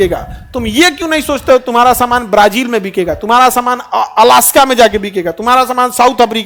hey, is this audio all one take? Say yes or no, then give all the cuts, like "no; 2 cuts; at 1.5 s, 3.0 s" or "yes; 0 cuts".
yes; 0 cuts